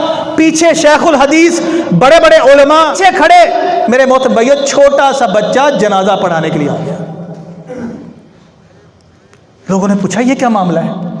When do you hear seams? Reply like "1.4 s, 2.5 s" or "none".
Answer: 3.0 s